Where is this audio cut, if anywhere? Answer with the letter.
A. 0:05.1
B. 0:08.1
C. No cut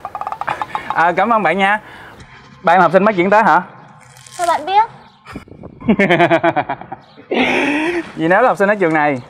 B